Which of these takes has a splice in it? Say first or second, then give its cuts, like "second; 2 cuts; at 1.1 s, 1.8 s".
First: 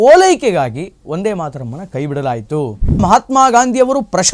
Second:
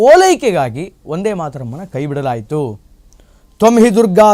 first; 1 cut; at 3.0 s